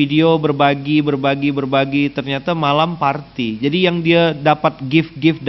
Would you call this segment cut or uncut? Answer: uncut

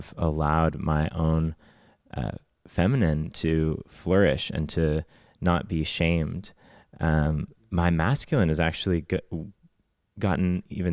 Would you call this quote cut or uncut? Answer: uncut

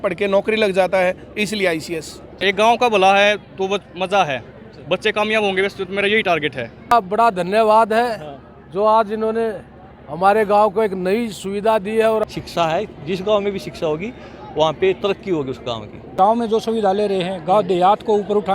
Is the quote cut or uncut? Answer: cut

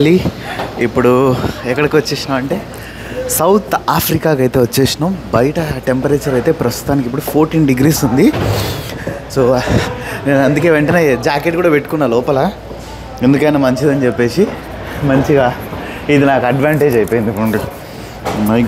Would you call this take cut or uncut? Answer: uncut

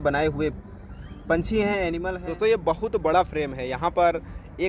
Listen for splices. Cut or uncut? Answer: cut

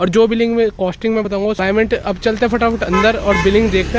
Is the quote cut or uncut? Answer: cut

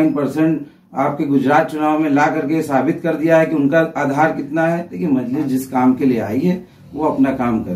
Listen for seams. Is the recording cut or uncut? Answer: cut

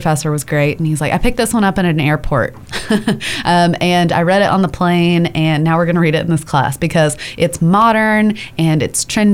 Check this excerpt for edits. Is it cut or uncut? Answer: uncut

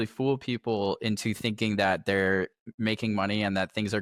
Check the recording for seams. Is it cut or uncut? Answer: uncut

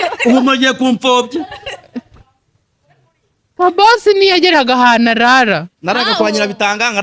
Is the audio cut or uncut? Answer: uncut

